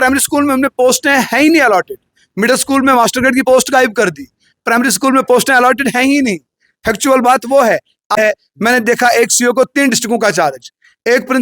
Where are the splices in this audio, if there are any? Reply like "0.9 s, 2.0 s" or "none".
8.2 s